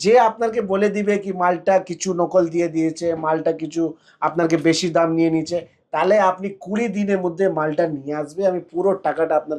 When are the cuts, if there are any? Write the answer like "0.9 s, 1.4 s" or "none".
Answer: none